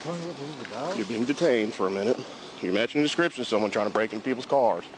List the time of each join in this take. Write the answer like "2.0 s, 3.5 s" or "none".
2.7 s